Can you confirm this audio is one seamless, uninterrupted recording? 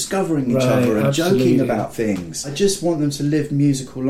no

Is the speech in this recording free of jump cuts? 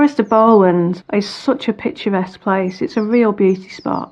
no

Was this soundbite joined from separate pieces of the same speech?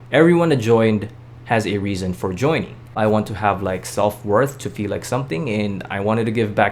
yes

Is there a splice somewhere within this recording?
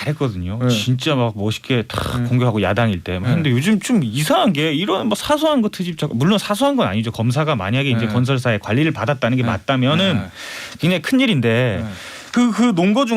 no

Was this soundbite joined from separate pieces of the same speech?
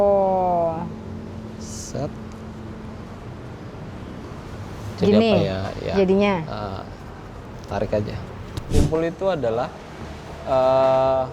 yes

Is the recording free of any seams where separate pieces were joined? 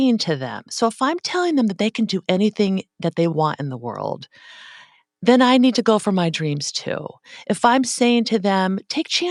yes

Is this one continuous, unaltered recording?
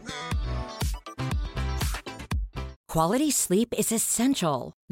no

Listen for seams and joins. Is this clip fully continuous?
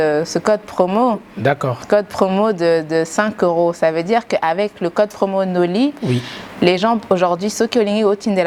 yes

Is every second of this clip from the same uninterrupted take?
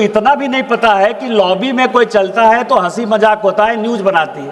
yes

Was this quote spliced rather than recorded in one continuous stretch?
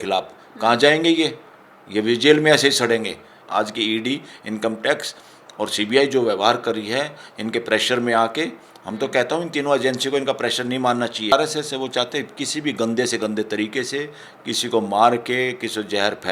yes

